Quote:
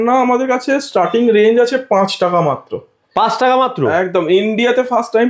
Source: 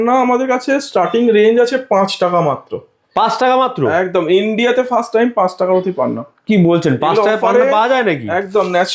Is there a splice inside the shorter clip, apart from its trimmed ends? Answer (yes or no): no